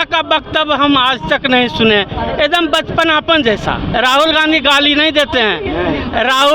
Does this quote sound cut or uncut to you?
cut